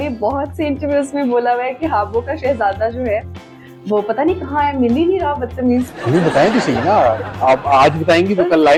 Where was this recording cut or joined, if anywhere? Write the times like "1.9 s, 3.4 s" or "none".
none